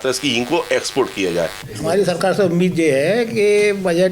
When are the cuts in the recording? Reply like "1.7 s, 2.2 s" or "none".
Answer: 1.6 s

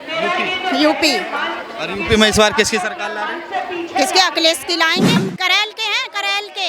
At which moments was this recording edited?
5.2 s

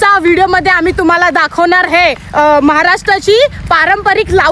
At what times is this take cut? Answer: none

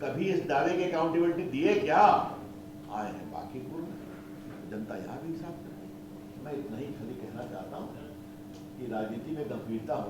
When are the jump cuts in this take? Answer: none

